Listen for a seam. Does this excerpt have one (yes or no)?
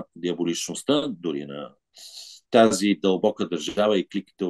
no